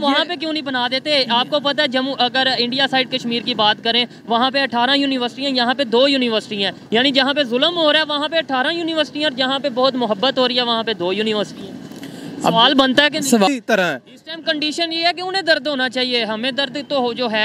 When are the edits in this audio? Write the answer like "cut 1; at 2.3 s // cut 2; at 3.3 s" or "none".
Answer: cut 1; at 13.5 s